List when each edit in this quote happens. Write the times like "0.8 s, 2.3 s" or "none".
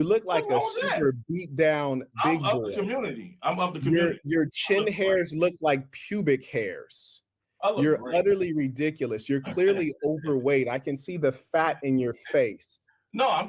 none